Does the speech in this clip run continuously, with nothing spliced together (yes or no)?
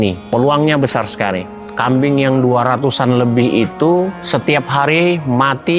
no